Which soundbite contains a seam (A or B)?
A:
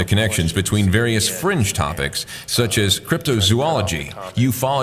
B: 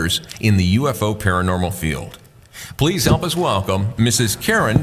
B